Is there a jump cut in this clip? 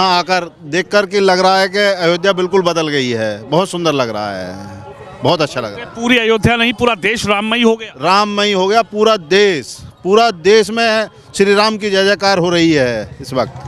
no; 0 cuts

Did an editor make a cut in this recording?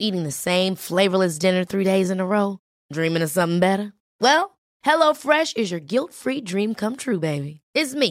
no; 0 cuts

